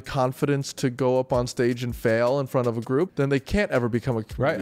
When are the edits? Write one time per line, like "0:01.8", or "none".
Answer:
0:03.1